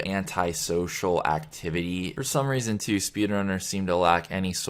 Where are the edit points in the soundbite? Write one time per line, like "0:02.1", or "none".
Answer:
0:02.2